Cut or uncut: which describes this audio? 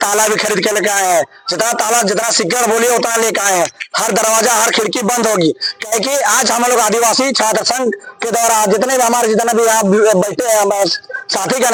uncut